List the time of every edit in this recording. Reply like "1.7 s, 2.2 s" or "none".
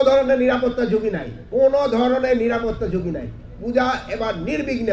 none